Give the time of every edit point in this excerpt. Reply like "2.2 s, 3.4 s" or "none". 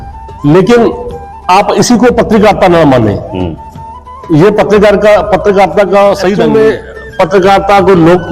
6.4 s